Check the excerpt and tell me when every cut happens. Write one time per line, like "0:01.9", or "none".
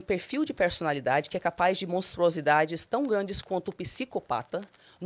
none